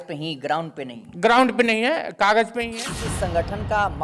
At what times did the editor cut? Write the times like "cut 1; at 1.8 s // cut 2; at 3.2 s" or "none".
cut 1; at 2.6 s